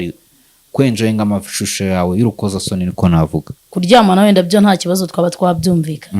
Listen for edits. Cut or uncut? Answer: cut